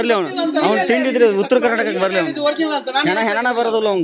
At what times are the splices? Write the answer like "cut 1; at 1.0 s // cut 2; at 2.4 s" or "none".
none